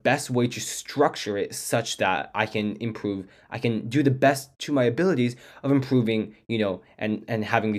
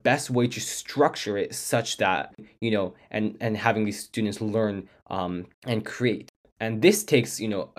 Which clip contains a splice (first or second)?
second